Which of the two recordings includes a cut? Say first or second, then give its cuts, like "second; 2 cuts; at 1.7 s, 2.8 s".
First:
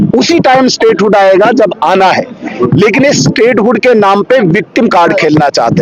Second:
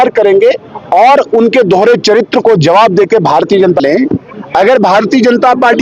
second; 1 cut; at 3.8 s